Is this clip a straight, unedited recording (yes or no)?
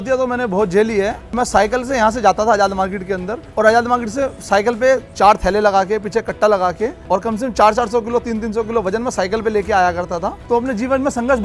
no